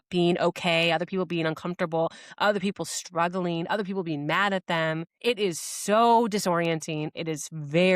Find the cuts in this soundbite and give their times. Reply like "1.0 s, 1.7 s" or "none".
5.1 s